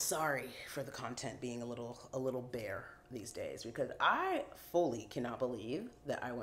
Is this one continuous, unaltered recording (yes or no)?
yes